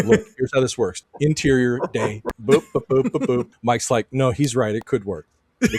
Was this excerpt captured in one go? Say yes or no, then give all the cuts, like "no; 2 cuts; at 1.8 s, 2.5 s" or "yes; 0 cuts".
no; 3 cuts; at 1.0 s, 2.3 s, 3.5 s